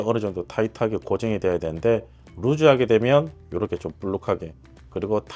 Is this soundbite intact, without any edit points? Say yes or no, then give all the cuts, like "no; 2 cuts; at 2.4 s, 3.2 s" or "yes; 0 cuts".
yes; 0 cuts